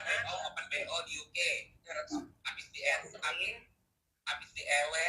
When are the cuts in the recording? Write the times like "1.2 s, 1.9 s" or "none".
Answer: none